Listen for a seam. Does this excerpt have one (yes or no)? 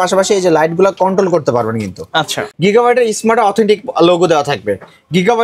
yes